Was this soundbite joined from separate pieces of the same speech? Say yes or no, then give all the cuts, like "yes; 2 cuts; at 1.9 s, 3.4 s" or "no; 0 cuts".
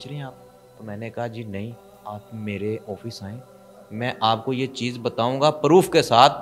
yes; 1 cut; at 1.9 s